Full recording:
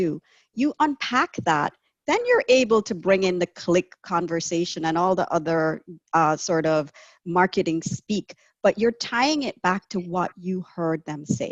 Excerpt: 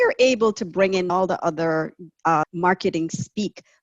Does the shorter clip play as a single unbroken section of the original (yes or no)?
no